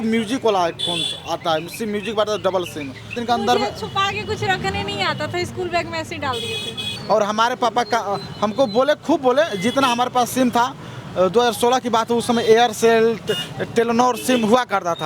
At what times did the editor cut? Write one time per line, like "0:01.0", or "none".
0:03.2
0:06.9